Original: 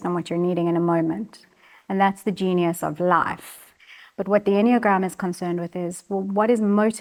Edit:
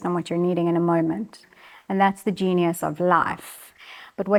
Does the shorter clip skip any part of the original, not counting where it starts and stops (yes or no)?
no